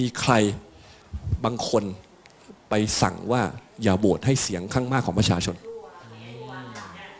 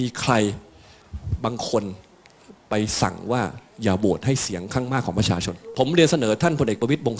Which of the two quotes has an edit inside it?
second; 1 cut; at 5.6 s

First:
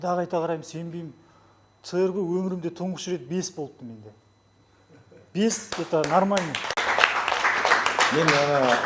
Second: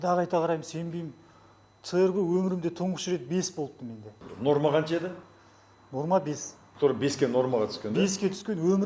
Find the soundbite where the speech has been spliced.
second; 1 cut; at 4.2 s

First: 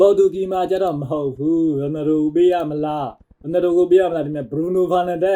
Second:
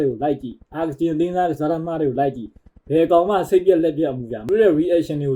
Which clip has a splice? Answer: second; 1 cut; at 4.4 s

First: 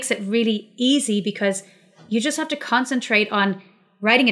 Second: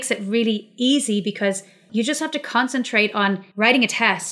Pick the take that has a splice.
second; 2 cuts; at 1.7 s, 3.5 s

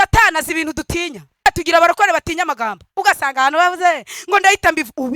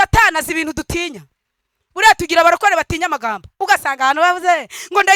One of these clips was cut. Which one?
first; 1 cut; at 1.5 s

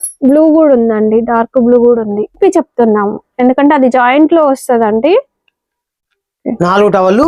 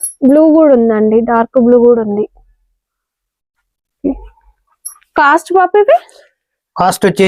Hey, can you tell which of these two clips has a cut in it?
first; 1 cut; at 2.4 s

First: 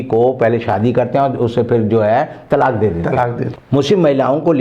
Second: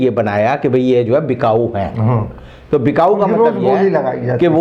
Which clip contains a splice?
first; 1 cut; at 3.5 s

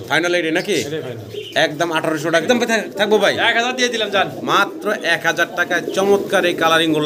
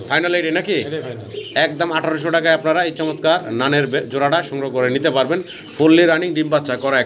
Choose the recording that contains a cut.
first; 1 cut; at 2.4 s

